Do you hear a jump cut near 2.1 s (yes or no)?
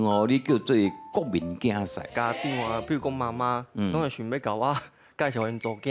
yes